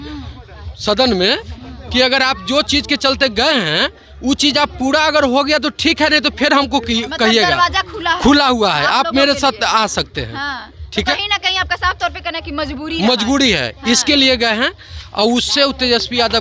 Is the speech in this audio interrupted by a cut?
no; 0 cuts

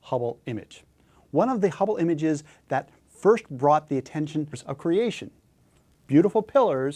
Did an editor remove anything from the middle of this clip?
no; 0 cuts

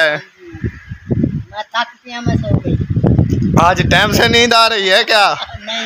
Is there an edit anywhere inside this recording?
no; 0 cuts

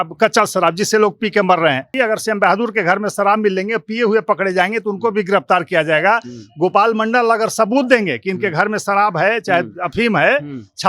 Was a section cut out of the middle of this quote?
yes; 1 cut; at 1.9 s

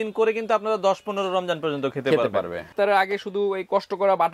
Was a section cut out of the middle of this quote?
yes; 1 cut; at 2.7 s

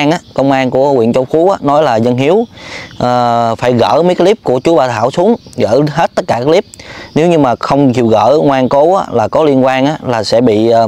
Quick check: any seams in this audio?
no; 0 cuts

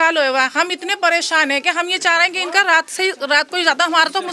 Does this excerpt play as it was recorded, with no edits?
yes; 0 cuts

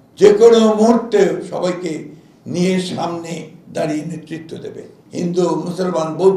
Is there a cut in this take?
yes; 1 cut; at 5.0 s

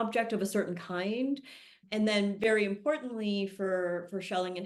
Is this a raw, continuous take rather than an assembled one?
yes; 0 cuts

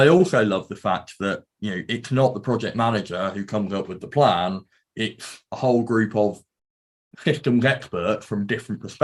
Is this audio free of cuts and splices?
yes; 0 cuts

